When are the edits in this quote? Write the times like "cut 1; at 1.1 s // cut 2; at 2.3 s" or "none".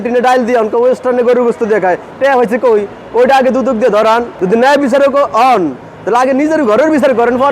cut 1; at 4.3 s